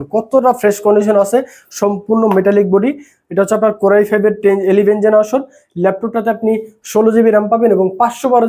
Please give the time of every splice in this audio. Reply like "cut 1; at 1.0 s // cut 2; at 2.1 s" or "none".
none